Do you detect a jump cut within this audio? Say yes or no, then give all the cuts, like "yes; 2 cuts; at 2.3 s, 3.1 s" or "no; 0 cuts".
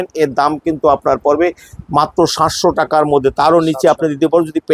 no; 0 cuts